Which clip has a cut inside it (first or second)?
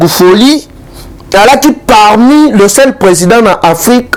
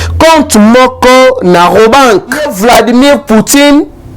second